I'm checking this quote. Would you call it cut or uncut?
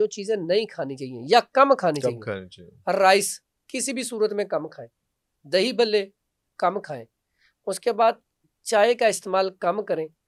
uncut